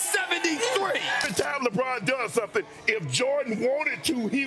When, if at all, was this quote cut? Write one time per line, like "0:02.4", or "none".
0:01.2

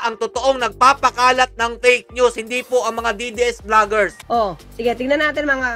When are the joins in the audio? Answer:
none

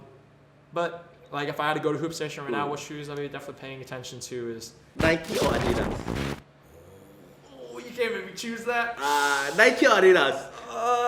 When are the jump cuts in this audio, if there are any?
0:04.8

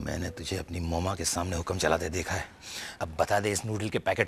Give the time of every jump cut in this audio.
none

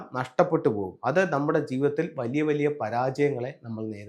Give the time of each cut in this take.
none

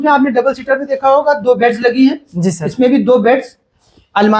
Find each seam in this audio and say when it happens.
none

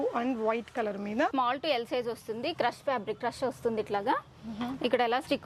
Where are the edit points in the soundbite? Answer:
0:01.3

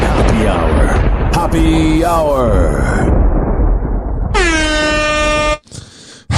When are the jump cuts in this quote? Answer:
none

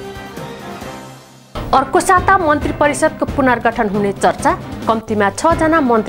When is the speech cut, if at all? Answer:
0:01.4

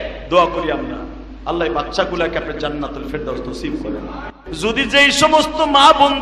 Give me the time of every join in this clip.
0:04.4

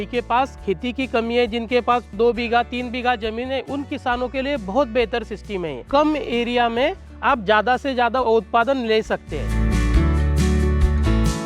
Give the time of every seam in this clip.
0:02.1
0:05.8
0:08.2
0:09.4

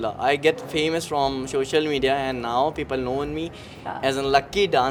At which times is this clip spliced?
none

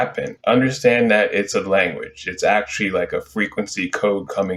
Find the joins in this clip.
none

